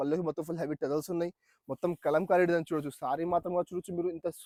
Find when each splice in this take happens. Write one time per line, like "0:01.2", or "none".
none